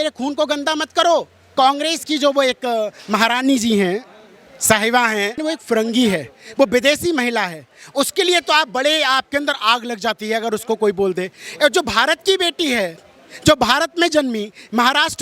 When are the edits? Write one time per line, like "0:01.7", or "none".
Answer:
0:01.4
0:05.4